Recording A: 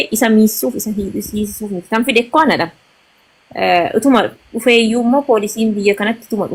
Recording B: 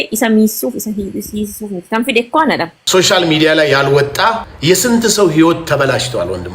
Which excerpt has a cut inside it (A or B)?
B